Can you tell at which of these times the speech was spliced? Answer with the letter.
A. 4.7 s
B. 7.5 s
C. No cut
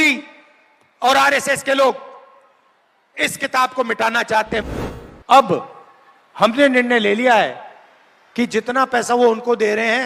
A